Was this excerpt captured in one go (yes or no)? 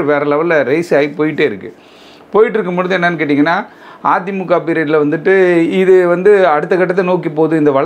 yes